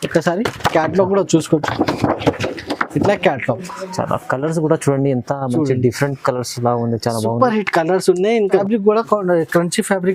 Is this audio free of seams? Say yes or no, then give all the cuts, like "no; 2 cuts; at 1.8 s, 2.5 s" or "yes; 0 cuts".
no; 1 cut; at 8.6 s